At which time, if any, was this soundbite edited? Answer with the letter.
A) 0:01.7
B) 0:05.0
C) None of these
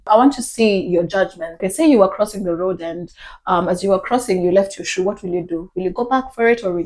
A